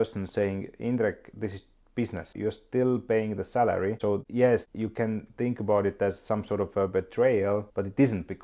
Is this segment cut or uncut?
uncut